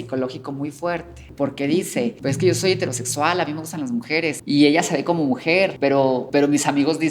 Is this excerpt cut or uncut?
cut